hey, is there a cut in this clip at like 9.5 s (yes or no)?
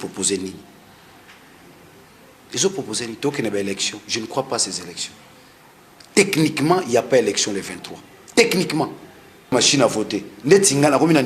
yes